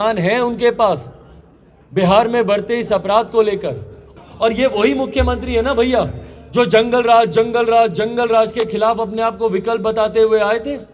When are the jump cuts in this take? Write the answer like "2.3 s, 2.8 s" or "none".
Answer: 4.0 s